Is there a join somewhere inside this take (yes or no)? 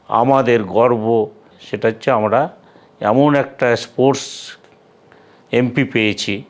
yes